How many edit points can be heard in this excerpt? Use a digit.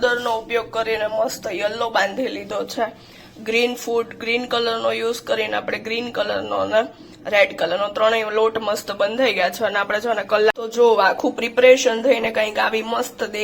1